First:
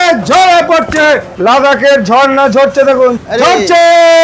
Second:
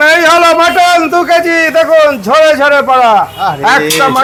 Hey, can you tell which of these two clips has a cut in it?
first; 2 cuts; at 1.3 s, 3.2 s

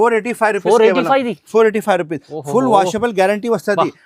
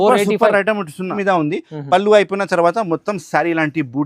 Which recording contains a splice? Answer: second; 1 cut; at 1.1 s

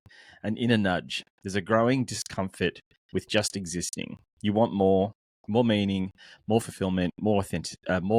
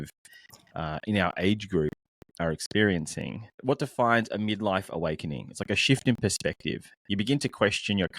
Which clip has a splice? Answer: second; 1 cut; at 3.6 s

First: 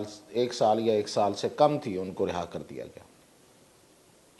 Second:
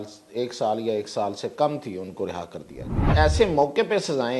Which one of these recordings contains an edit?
second; 1 cut; at 3.0 s

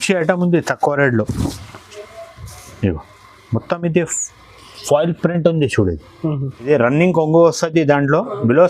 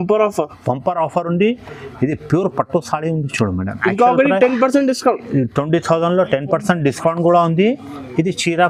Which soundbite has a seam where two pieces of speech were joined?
first; 1 cut; at 6.6 s

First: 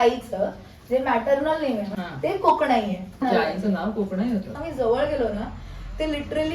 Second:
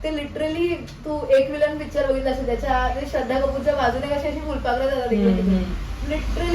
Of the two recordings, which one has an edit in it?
first; 3 cuts; at 1.9 s, 3.2 s, 4.6 s

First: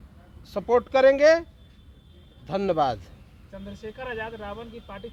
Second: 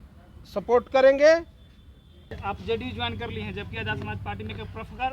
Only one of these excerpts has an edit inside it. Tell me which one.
second; 1 cut; at 2.4 s

